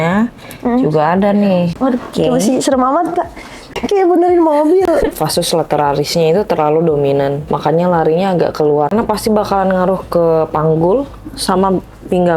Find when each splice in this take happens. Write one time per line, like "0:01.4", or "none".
0:01.7
0:03.8
0:08.9